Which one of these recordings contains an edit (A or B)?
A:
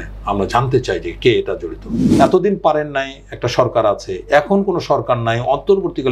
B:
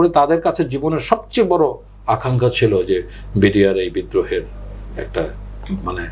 A